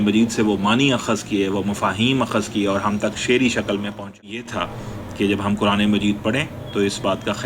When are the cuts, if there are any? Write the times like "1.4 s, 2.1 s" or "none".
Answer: 4.4 s